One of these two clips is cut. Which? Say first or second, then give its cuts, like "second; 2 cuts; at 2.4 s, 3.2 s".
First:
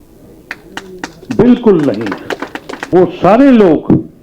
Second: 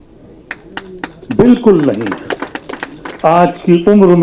first; 1 cut; at 2.9 s